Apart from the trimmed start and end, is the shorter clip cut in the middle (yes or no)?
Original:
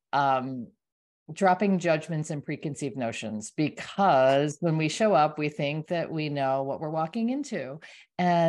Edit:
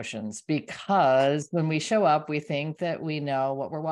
no